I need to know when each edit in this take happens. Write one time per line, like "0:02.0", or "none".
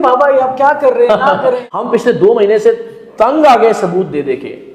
0:01.7